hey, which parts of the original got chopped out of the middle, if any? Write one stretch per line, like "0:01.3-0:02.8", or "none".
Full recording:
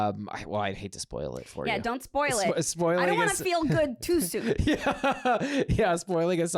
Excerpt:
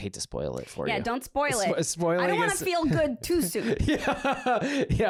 none